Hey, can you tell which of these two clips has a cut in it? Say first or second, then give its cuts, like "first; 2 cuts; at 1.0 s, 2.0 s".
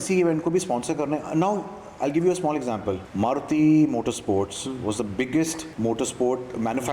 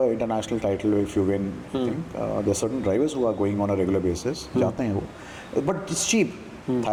first; 2 cuts; at 3.1 s, 5.6 s